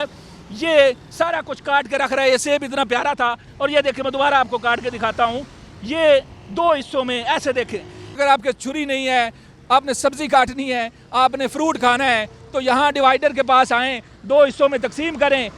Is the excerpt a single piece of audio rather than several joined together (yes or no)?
no